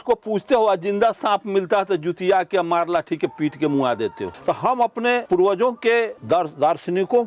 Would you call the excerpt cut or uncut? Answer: cut